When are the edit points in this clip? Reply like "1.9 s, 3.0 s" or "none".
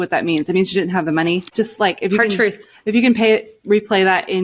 1.5 s